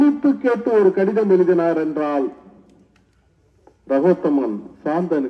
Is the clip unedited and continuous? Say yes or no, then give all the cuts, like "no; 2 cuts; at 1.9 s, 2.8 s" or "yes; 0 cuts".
yes; 0 cuts